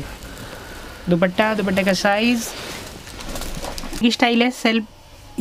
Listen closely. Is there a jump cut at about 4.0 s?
yes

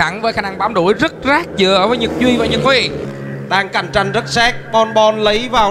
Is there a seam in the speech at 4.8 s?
no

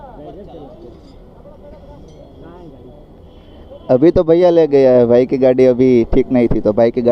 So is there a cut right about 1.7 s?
yes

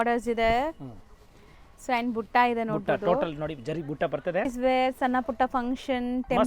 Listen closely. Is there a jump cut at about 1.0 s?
no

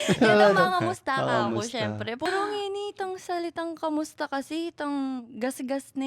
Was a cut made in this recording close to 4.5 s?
no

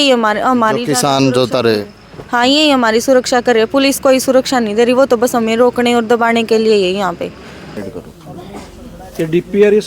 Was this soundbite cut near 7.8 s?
yes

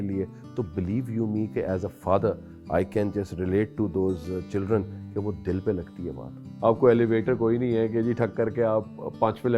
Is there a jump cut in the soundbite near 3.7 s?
no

